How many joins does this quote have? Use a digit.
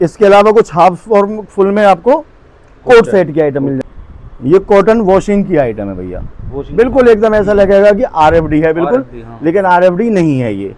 1